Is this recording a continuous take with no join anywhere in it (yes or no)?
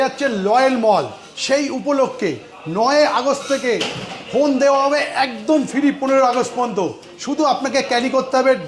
yes